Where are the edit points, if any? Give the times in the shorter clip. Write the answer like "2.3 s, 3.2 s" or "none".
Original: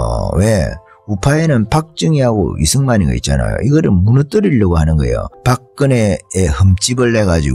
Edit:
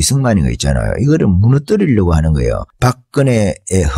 none